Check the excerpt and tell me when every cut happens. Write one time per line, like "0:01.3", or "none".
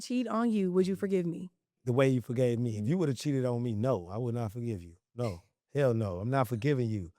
0:01.8